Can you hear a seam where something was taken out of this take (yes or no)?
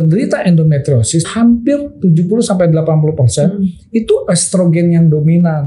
yes